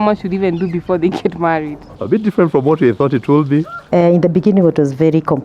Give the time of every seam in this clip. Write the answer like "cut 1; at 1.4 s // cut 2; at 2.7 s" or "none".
cut 1; at 1.9 s // cut 2; at 3.8 s